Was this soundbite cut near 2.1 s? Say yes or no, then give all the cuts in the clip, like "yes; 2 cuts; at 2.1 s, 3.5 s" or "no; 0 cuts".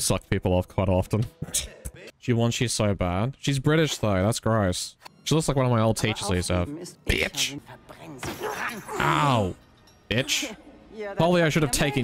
yes; 2 cuts; at 2.1 s, 7.6 s